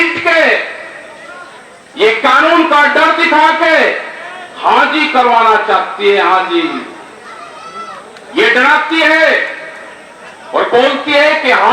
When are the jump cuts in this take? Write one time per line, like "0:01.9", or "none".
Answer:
none